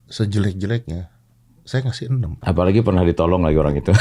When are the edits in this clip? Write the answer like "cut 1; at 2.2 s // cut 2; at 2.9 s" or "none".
cut 1; at 2.3 s